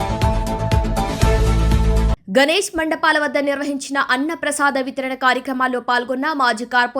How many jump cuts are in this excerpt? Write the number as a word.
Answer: one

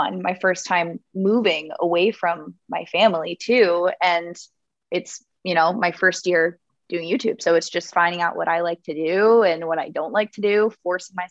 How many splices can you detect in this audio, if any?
zero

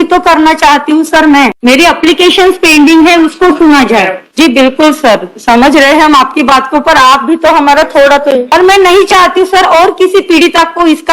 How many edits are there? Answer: three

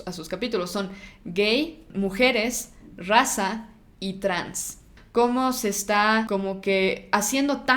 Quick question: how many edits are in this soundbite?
three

